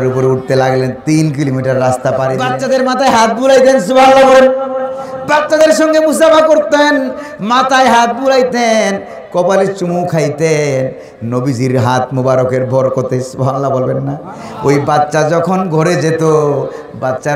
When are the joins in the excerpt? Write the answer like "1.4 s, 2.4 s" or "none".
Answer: 2.5 s